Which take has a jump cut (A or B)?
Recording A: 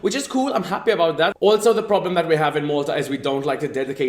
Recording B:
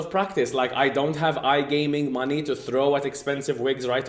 A